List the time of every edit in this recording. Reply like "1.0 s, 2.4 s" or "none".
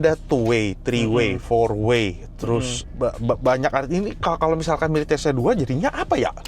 none